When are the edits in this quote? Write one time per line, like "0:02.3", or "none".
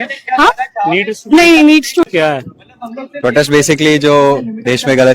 0:02.0